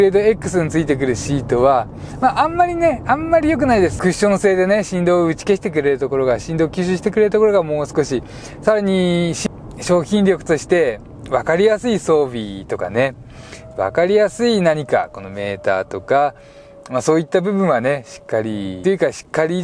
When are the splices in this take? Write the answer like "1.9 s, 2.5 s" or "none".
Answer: 4.0 s, 9.4 s, 18.7 s